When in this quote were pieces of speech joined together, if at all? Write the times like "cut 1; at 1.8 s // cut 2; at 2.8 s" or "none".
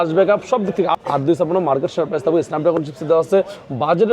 cut 1; at 0.9 s